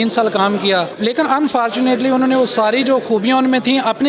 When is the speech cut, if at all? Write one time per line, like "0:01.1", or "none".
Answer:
0:00.9